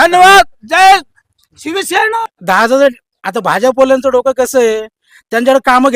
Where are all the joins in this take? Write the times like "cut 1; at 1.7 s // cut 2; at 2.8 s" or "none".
cut 1; at 2.2 s